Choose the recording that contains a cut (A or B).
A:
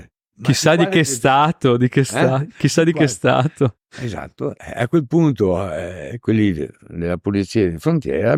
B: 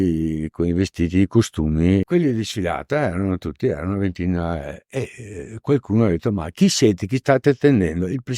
B